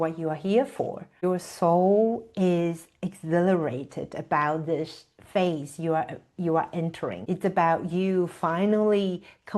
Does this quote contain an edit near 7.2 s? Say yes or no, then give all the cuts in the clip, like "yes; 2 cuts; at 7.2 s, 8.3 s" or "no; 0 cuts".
yes; 2 cuts; at 1.1 s, 7.2 s